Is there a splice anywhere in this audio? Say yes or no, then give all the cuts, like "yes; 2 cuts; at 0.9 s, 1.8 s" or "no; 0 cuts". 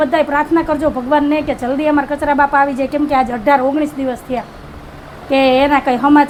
no; 0 cuts